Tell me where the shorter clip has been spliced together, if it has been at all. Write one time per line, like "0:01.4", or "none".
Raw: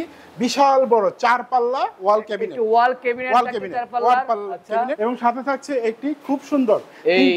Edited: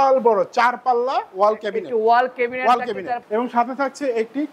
0:03.2